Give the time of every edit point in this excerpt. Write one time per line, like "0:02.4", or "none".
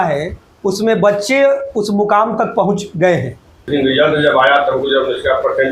0:03.6